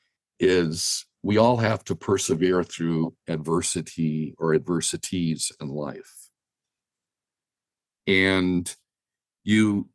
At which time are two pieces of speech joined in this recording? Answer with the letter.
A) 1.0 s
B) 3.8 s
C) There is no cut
A